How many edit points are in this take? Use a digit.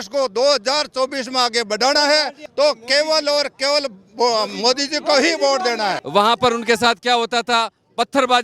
2